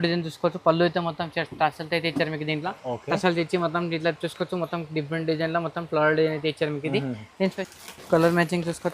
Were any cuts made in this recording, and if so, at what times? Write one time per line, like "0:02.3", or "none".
0:07.5

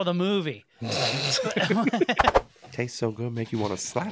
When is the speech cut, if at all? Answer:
0:02.4

